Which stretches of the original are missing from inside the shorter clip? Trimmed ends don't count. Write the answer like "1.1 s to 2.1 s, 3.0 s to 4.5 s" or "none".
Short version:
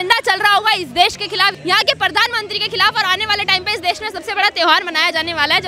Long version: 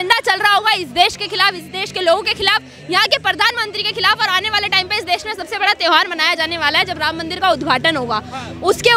1.6 s to 2.8 s